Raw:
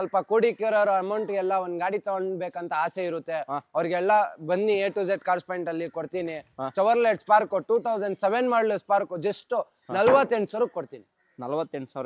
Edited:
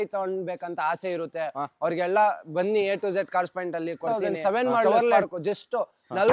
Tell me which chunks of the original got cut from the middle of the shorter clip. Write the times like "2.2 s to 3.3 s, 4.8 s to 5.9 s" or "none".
6.0 s to 7.8 s